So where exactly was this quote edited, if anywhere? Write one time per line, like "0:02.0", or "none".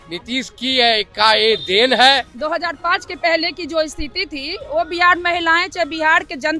0:02.3